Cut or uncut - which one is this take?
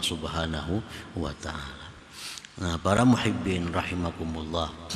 uncut